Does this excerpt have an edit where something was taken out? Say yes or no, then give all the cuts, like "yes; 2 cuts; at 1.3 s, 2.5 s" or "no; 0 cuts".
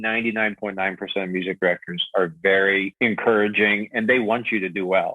yes; 1 cut; at 2.9 s